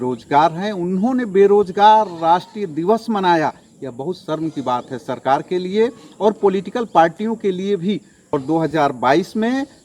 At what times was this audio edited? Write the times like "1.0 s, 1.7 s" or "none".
8.3 s